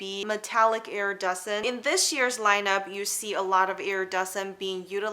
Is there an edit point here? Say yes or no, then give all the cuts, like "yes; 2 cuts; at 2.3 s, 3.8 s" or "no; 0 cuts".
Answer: yes; 1 cut; at 1.6 s